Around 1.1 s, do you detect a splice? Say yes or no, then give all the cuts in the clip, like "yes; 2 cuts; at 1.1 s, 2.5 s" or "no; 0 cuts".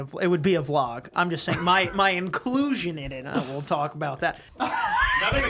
no; 1 cut; at 4.4 s